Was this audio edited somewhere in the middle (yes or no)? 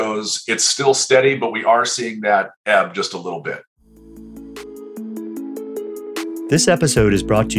yes